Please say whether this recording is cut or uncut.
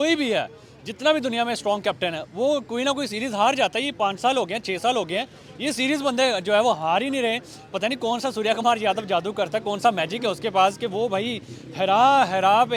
uncut